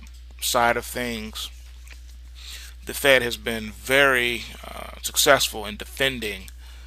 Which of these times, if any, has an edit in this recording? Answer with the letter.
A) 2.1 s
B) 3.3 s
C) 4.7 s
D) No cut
D